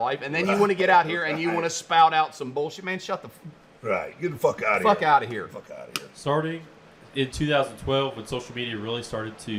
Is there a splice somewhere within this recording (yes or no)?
no